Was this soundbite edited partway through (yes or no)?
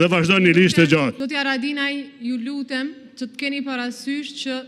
yes